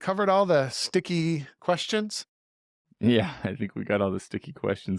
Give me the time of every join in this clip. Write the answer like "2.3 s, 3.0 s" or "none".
1.5 s